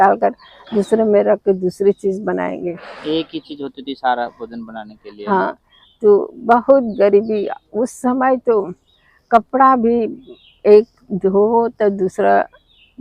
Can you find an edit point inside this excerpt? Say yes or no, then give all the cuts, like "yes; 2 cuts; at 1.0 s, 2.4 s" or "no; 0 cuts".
no; 0 cuts